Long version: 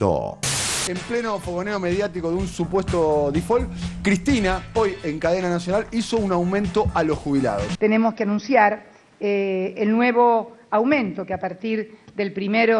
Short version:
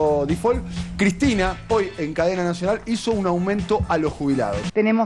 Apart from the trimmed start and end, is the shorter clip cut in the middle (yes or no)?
no